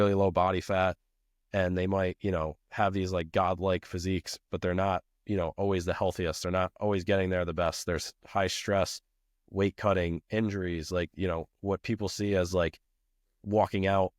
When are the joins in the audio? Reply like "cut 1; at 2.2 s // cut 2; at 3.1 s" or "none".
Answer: none